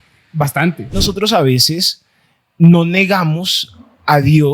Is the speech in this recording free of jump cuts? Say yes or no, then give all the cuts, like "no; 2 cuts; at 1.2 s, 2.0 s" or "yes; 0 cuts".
no; 1 cut; at 0.9 s